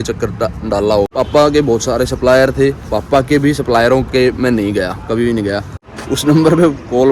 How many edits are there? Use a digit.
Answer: 2